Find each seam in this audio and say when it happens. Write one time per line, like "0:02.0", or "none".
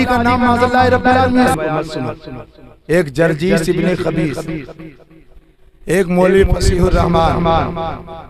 0:01.5